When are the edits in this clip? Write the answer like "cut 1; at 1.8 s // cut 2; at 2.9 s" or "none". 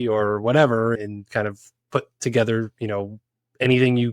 cut 1; at 1.0 s